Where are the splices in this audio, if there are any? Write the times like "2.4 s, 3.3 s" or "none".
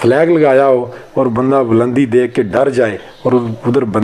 none